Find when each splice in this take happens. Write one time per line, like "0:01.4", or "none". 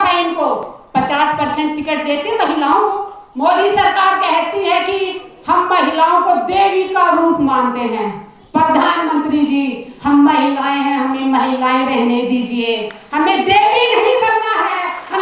0:03.2